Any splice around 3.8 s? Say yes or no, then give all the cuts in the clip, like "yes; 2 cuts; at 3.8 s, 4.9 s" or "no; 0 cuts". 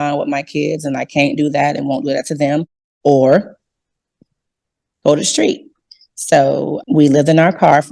no; 1 cut; at 6.8 s